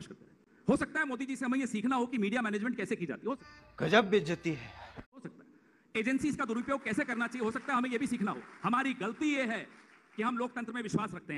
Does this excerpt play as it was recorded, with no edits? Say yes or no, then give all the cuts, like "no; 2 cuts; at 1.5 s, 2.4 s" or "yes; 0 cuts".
yes; 0 cuts